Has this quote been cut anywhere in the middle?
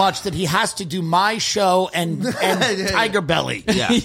no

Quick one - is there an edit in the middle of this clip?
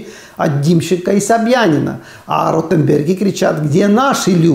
no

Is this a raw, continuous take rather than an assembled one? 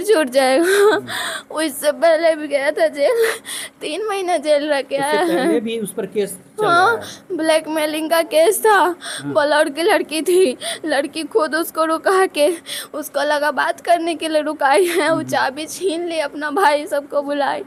yes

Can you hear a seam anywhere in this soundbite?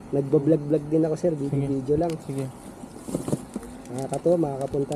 no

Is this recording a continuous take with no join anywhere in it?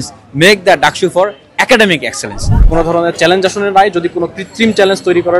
no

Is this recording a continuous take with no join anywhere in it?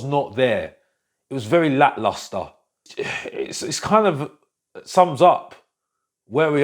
no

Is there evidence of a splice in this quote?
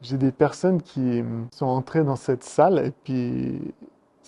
yes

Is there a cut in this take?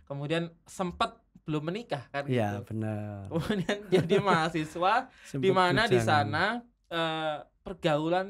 no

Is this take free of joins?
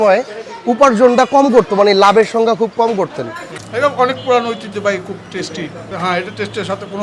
no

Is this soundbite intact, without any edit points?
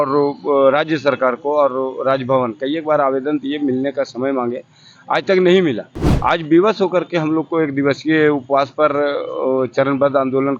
yes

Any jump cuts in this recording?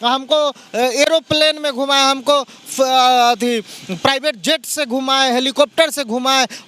no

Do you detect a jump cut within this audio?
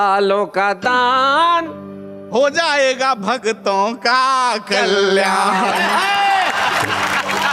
no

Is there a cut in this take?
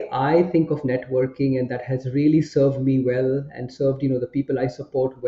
no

